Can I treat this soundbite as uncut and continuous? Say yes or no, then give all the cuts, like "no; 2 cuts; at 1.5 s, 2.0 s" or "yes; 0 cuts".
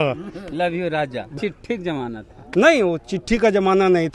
no; 1 cut; at 1.3 s